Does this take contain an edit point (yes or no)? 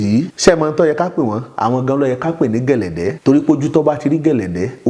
no